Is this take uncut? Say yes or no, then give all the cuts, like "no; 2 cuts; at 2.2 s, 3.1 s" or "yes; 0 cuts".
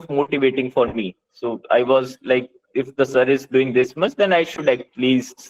yes; 0 cuts